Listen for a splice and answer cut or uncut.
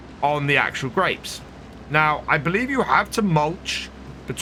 uncut